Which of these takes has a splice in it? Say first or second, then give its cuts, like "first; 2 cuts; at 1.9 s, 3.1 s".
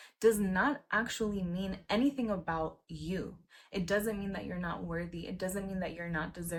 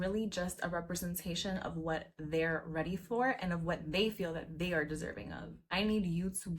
second; 1 cut; at 5.6 s